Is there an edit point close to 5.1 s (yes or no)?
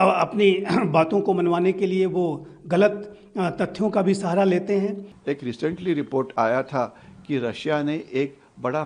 yes